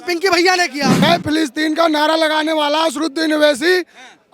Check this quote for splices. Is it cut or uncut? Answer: cut